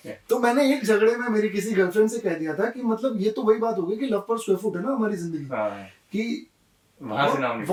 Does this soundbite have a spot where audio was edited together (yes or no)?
no